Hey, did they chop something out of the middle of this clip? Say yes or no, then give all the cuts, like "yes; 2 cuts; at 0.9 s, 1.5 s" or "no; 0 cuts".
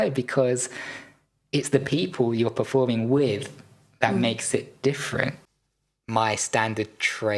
yes; 1 cut; at 5.5 s